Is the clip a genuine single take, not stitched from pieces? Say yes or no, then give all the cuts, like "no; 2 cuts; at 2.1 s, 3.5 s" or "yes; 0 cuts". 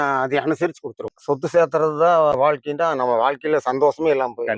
no; 2 cuts; at 1.2 s, 2.5 s